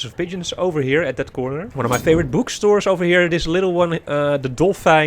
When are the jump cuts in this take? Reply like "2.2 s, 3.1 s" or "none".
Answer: none